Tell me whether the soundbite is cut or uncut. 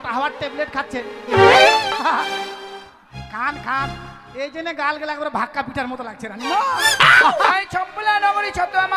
cut